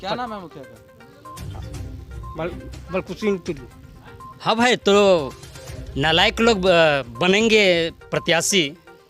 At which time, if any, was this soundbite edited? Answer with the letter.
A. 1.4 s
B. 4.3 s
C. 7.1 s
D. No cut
B